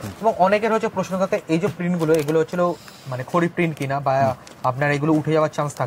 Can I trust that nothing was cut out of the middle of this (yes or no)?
yes